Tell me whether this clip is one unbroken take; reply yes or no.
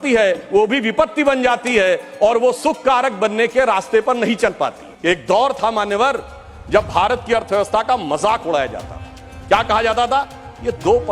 no